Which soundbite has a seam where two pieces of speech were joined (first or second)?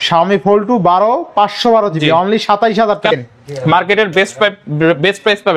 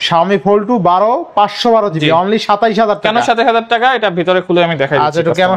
first